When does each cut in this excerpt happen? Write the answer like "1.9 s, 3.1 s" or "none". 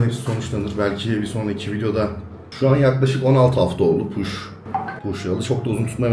2.4 s